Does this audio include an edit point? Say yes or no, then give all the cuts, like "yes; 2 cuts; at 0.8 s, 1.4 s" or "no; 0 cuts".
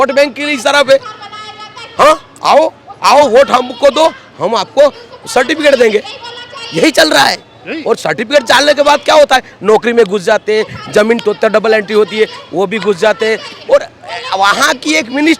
no; 0 cuts